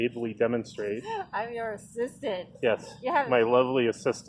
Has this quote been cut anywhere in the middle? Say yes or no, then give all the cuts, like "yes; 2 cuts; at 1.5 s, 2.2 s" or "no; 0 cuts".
no; 0 cuts